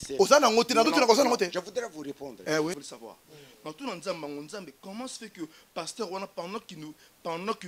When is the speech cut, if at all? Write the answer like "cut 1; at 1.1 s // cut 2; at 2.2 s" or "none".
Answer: cut 1; at 2.8 s